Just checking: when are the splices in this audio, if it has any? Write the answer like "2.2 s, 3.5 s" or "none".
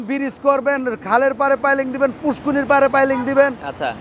none

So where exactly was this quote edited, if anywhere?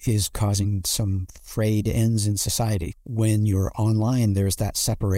2.9 s

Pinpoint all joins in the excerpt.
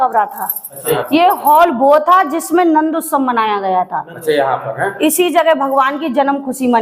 1.0 s

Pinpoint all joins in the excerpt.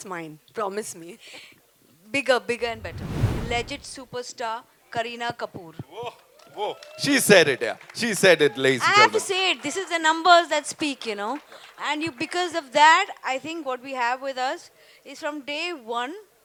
none

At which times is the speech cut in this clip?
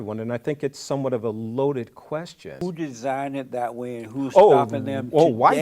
2.6 s

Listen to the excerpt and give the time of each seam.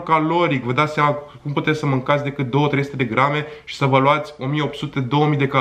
none

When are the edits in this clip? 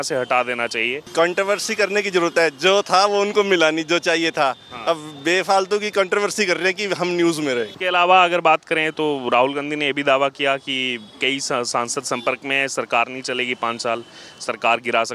1.0 s, 7.7 s

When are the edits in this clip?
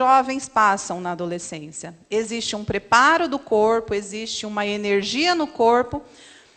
none

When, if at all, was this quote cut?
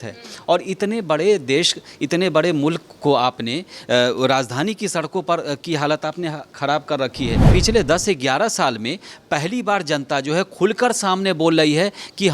7.5 s

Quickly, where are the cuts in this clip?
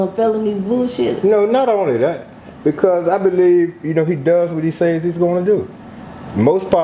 none

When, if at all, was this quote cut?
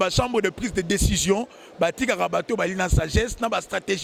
none

